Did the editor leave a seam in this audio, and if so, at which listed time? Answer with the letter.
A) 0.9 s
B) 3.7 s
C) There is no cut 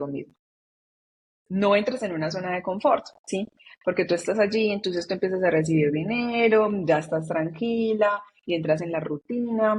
A